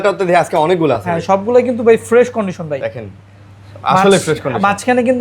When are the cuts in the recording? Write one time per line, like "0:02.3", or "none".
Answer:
none

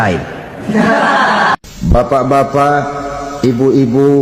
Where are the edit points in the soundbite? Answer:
0:01.5

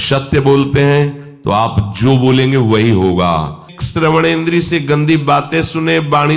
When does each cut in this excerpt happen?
0:03.7

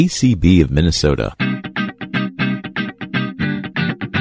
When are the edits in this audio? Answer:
0:01.3

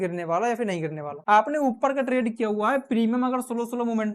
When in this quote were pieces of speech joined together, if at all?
none

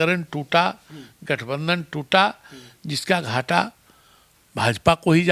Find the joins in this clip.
none

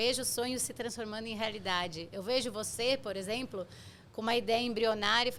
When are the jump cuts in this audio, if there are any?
none

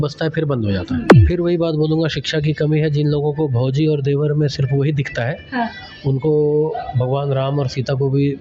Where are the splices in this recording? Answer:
0:01.1

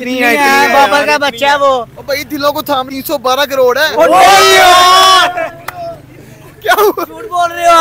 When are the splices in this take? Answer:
0:02.9

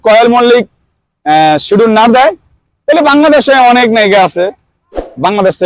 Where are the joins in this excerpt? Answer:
none

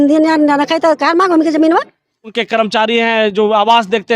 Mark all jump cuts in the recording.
0:02.3

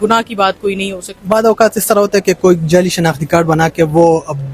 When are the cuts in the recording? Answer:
0:01.1

